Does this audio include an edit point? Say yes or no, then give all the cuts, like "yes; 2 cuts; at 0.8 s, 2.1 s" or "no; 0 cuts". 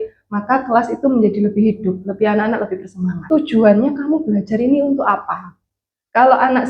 yes; 1 cut; at 3.2 s